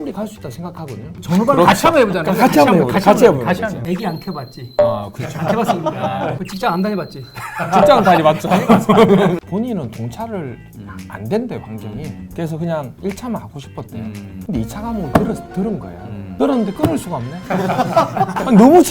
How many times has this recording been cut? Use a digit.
2